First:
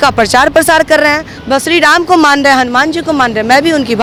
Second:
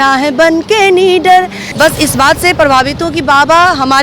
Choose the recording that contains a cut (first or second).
second